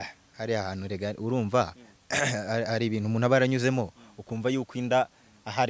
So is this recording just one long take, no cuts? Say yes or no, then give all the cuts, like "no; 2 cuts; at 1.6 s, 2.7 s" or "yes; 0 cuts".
yes; 0 cuts